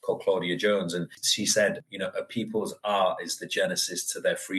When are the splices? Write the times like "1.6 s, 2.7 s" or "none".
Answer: 1.2 s